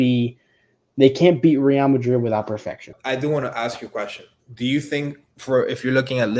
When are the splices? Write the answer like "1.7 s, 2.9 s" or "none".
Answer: 2.9 s